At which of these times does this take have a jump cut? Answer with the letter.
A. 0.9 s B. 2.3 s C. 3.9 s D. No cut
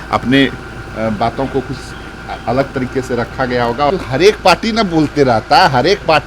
C